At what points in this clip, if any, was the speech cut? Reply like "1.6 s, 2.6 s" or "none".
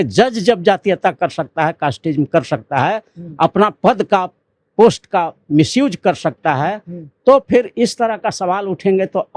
none